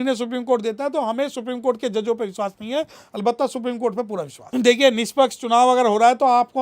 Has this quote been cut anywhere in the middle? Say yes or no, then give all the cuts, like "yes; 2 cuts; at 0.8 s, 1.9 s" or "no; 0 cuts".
yes; 1 cut; at 4.4 s